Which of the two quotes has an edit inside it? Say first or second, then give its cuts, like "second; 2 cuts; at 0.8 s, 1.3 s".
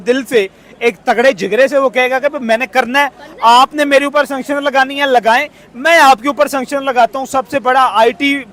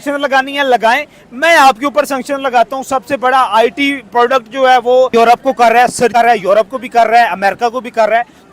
second; 1 cut; at 5.1 s